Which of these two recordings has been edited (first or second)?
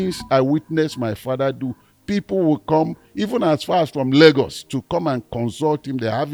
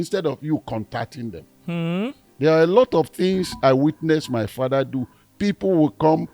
second